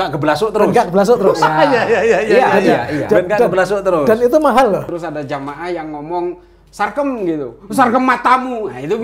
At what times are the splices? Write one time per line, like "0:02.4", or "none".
0:04.8